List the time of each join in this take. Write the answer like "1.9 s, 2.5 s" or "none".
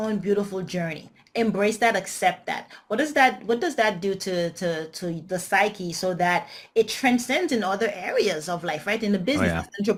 none